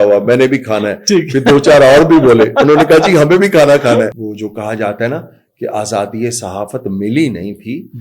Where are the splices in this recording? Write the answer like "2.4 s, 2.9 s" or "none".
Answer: 4.3 s